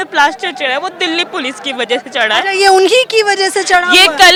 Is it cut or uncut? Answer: uncut